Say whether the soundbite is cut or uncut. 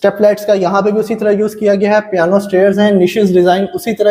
uncut